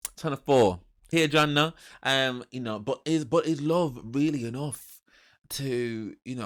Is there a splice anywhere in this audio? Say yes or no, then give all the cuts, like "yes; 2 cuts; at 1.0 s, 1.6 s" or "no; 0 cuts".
no; 0 cuts